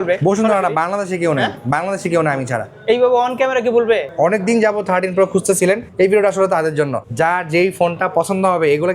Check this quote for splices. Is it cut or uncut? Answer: cut